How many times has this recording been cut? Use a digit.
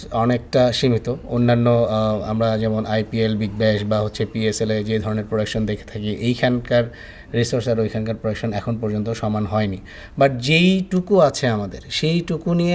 0